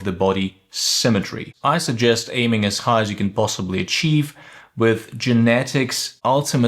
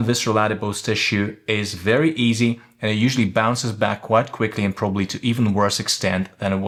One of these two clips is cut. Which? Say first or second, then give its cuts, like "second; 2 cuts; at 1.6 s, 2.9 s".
first; 1 cut; at 1.4 s